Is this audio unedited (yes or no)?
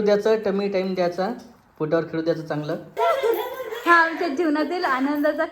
no